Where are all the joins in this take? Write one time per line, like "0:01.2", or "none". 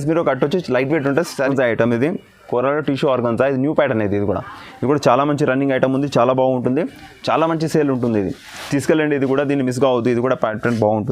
0:01.5